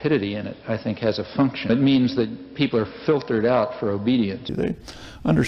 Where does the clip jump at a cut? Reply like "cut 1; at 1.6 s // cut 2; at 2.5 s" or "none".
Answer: cut 1; at 1.7 s // cut 2; at 4.5 s